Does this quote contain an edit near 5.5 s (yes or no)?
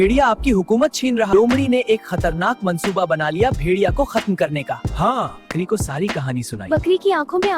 yes